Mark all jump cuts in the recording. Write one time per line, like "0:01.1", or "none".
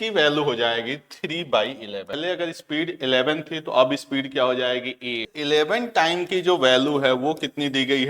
0:02.2
0:05.3